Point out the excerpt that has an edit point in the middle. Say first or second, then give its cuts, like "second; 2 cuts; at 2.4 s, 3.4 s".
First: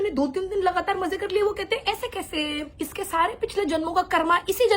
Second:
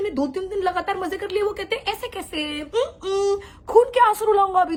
first; 1 cut; at 2.6 s